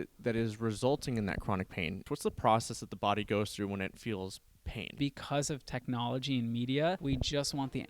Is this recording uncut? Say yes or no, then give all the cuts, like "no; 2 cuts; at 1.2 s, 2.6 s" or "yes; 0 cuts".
no; 3 cuts; at 2.0 s, 4.9 s, 7.0 s